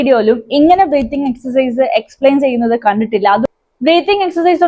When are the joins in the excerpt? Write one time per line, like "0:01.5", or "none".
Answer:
0:03.4